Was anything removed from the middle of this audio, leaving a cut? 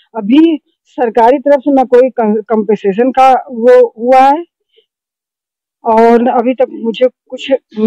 no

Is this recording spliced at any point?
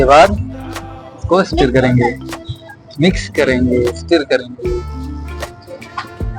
no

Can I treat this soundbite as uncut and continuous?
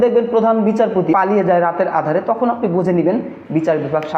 no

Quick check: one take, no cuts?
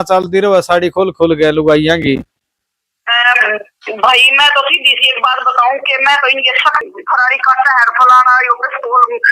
no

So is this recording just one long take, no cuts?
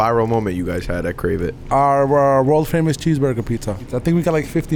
no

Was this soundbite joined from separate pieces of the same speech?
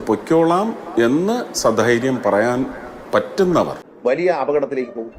yes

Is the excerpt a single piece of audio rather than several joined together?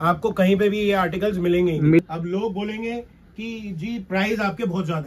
no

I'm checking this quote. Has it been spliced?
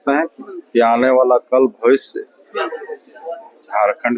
no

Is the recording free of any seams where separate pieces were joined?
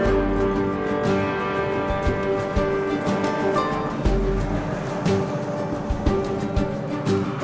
yes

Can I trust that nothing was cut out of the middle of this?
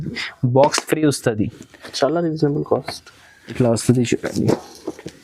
no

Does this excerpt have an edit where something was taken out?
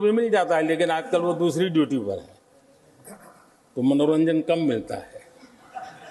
no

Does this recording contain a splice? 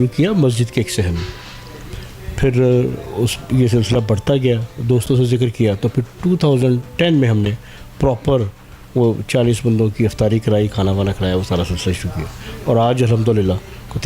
no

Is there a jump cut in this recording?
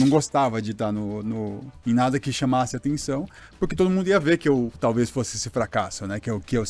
no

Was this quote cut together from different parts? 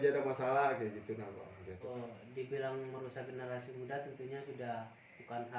yes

